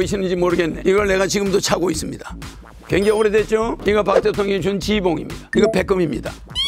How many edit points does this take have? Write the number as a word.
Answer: three